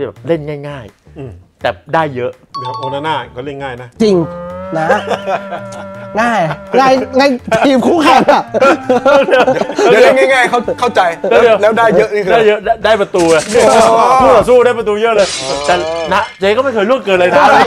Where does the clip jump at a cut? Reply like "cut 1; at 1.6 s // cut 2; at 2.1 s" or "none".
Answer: none